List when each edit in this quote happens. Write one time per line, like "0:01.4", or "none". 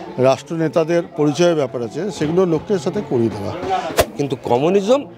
0:03.9